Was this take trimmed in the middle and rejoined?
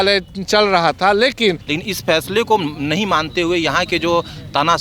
yes; 1 cut; at 1.7 s

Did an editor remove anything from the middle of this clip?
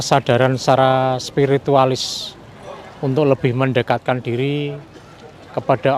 no; 0 cuts

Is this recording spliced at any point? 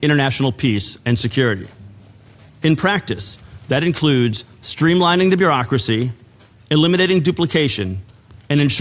no; 0 cuts

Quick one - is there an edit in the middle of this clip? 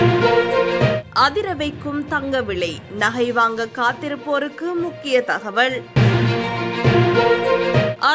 no; 0 cuts

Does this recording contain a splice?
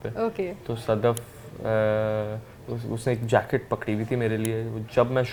no; 0 cuts

